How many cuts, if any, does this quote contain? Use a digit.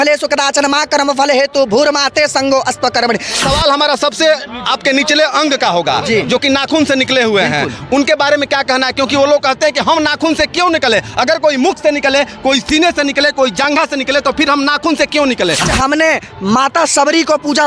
2